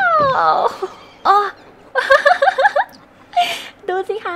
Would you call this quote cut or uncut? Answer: cut